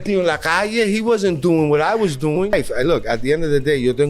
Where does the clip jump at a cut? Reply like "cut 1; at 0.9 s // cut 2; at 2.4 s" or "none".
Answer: cut 1; at 2.5 s